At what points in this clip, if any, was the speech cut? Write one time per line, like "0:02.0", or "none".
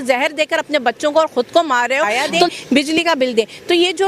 0:02.3